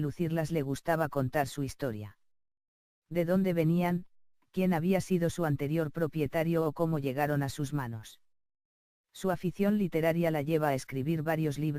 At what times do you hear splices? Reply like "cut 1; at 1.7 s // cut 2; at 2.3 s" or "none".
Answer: cut 1; at 7.9 s